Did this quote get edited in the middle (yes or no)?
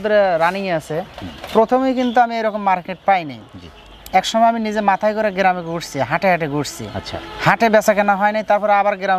no